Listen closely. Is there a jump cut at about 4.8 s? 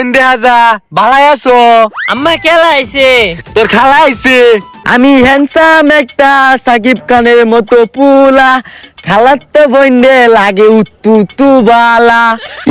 yes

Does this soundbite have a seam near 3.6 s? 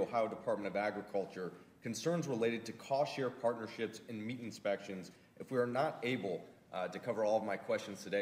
yes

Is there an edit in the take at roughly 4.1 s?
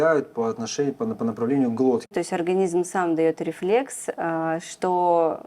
no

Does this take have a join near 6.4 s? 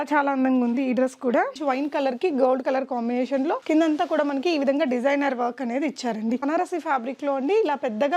yes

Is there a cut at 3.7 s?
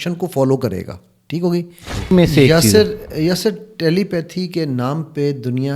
no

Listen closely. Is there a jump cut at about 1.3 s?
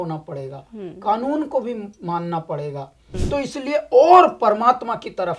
no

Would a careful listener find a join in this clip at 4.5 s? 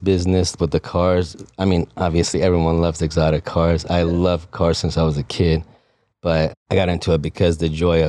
no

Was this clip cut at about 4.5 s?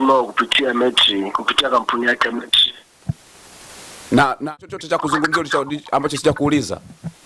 yes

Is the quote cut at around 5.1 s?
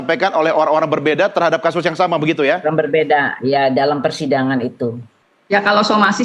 yes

